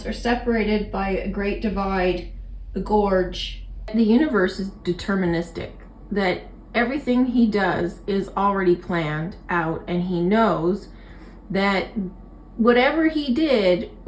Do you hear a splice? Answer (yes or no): yes